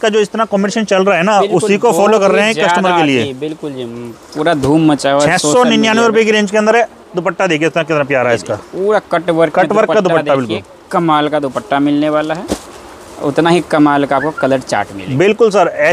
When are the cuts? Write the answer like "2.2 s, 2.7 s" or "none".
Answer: none